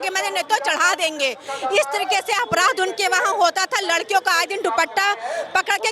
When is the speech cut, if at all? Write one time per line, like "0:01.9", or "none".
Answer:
none